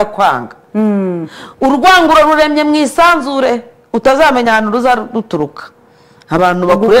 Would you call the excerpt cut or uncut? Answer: uncut